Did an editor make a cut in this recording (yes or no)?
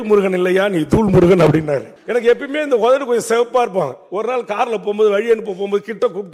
yes